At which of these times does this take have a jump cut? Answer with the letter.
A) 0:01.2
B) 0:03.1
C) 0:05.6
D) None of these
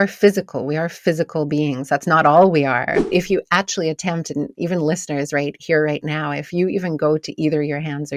B